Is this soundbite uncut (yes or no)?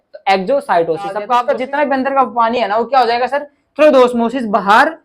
no